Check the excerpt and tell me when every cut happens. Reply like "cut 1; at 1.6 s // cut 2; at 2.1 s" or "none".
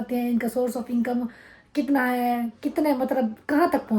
none